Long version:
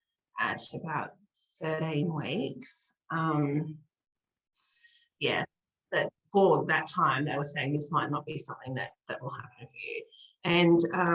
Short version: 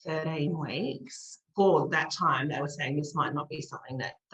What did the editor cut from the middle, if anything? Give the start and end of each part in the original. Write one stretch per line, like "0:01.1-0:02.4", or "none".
0:03.0-0:06.2